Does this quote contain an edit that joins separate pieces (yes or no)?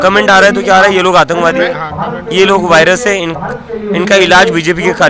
no